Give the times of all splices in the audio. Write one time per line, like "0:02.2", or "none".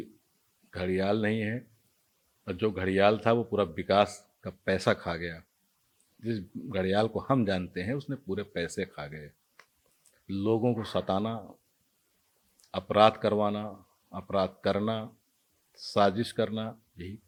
none